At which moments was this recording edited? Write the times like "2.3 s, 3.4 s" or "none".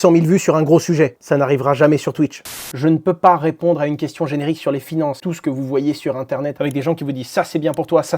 2.6 s, 5.2 s, 6.6 s